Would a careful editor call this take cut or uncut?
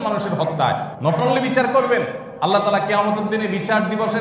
cut